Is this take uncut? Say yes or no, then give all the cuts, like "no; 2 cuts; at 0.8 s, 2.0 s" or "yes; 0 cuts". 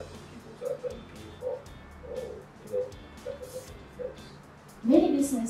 no; 1 cut; at 4.6 s